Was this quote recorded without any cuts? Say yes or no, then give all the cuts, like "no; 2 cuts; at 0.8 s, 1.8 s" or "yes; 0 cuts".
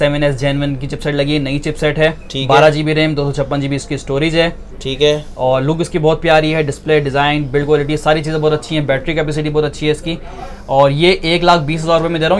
yes; 0 cuts